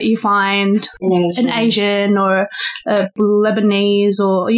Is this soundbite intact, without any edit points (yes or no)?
no